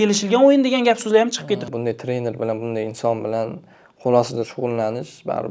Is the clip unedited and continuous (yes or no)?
no